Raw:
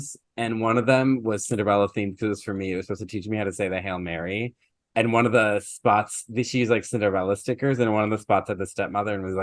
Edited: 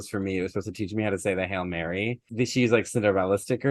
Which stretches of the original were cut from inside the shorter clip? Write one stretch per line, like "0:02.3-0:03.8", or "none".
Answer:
0:04.6-0:06.2